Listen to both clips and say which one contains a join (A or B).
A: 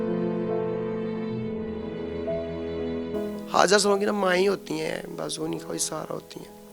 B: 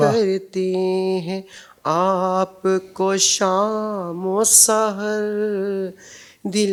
A